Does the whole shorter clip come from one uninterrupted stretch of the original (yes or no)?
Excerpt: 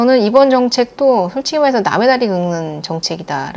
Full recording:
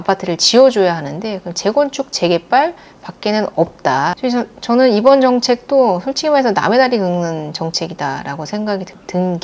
yes